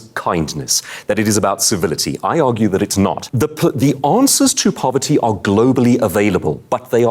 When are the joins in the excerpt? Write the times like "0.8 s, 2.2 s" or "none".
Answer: 3.2 s